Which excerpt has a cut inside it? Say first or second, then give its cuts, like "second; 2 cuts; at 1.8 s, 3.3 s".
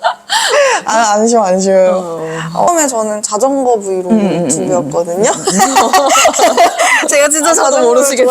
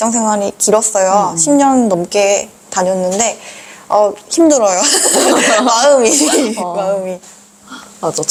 first; 1 cut; at 2.7 s